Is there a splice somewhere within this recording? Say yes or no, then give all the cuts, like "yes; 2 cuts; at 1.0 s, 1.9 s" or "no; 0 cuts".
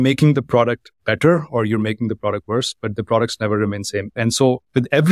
yes; 1 cut; at 4.2 s